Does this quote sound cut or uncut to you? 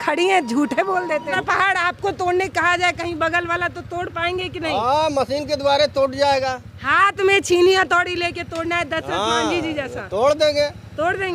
cut